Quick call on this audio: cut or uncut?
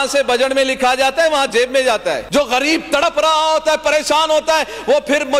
cut